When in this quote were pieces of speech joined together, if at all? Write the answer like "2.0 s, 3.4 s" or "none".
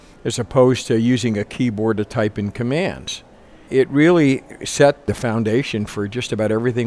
3.6 s, 5.0 s